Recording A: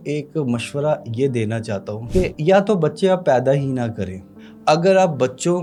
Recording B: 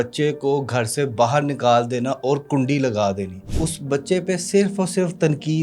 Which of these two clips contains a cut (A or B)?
B